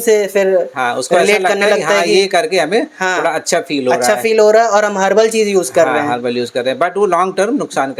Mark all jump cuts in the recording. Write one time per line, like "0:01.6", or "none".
none